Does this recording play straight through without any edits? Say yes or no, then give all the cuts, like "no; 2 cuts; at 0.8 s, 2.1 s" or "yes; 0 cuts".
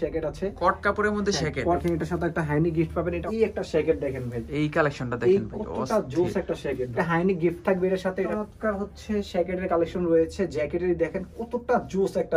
no; 4 cuts; at 1.8 s, 3.2 s, 6.9 s, 8.3 s